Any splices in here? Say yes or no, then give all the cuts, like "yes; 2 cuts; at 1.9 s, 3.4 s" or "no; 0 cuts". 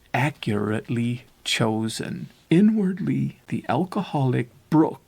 yes; 2 cuts; at 2.3 s, 3.4 s